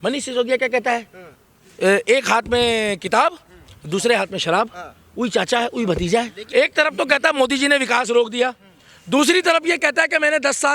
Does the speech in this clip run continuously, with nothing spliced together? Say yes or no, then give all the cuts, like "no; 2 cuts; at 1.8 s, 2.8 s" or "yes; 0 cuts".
no; 1 cut; at 6.4 s